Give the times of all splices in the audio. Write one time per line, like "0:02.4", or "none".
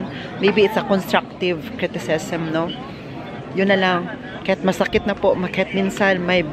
none